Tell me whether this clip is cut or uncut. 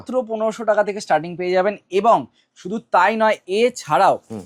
uncut